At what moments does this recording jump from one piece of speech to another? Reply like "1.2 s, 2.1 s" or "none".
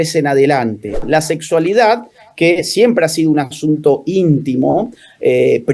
1.0 s